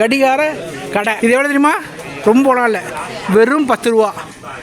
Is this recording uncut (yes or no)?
no